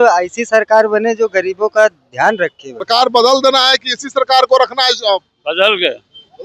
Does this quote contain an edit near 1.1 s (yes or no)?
no